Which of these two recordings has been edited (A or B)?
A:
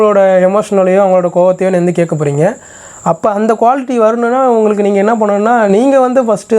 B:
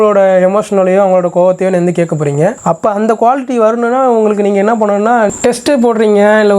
B